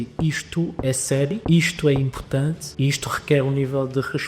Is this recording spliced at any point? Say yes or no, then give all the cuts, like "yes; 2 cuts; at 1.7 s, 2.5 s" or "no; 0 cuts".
yes; 2 cuts; at 1.4 s, 2.6 s